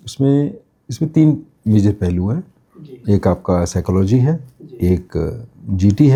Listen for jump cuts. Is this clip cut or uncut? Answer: uncut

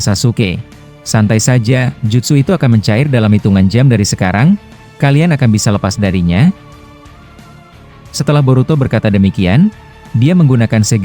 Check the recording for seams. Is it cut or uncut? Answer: cut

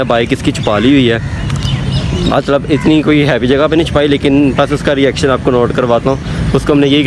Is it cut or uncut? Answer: uncut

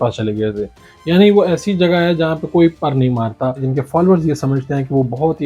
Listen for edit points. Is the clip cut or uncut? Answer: cut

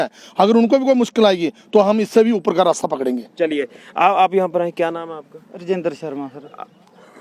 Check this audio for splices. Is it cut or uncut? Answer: uncut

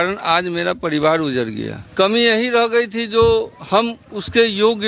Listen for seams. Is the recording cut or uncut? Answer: cut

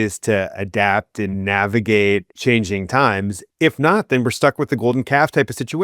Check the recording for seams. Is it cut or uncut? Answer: cut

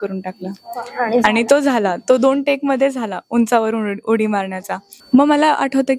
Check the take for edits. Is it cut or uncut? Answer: cut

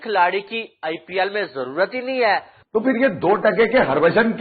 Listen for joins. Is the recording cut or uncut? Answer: cut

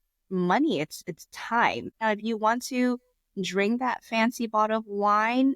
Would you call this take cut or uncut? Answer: cut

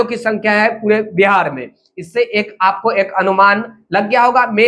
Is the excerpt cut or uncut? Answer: uncut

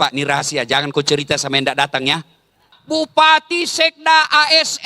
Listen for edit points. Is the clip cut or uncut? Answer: cut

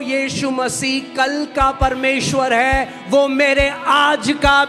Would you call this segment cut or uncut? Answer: uncut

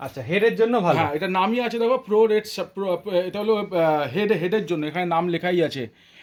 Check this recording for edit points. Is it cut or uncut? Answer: uncut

